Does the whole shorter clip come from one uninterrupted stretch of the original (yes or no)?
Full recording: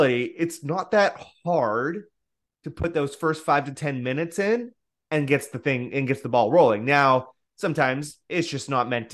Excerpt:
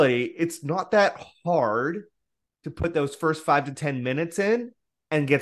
yes